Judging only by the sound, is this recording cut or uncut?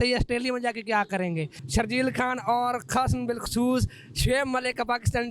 cut